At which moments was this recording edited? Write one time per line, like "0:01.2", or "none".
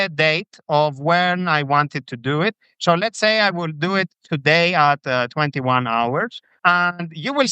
0:06.6